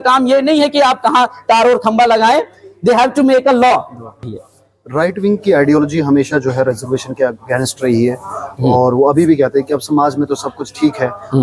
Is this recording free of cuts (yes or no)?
no